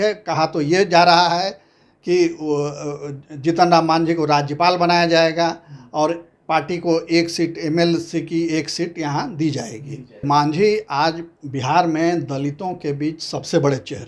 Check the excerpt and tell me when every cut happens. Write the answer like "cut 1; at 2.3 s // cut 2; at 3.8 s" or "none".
cut 1; at 10.2 s